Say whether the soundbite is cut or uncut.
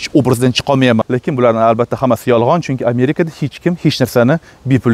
cut